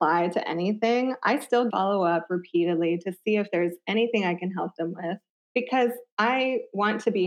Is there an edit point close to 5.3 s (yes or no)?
yes